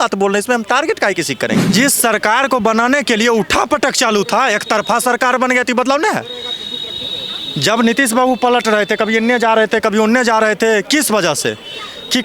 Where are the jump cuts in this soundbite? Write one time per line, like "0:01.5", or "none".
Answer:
0:01.7